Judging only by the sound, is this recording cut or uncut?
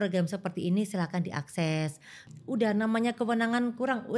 cut